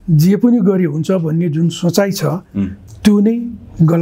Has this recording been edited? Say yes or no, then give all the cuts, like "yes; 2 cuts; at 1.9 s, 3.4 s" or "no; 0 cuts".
no; 0 cuts